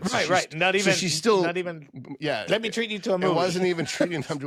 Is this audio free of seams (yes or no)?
yes